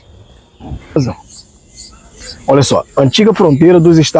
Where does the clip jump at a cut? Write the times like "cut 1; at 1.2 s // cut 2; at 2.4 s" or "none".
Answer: cut 1; at 1.0 s